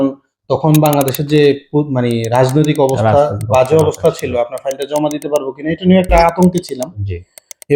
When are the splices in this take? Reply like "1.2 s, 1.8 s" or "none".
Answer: none